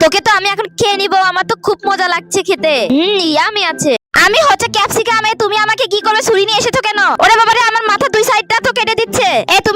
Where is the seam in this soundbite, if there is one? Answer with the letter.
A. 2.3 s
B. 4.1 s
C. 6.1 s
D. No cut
B